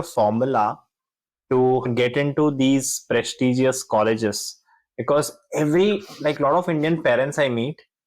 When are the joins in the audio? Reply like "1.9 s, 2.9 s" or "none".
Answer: 1.9 s